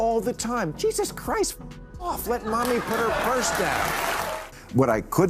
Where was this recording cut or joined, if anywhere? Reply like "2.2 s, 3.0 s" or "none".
4.4 s